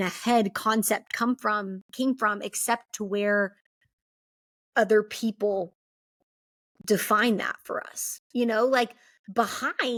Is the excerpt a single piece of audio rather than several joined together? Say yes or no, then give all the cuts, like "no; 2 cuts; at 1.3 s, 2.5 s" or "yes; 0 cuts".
yes; 0 cuts